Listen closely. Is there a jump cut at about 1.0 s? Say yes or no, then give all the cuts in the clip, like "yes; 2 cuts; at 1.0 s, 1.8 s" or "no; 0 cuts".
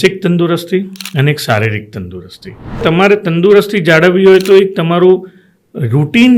no; 1 cut; at 2.8 s